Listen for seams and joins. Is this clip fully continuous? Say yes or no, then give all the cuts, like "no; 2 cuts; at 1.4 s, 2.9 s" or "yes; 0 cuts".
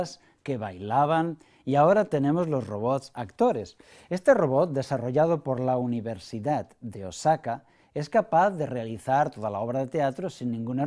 no; 1 cut; at 1.7 s